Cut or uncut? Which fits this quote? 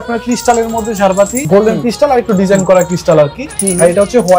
cut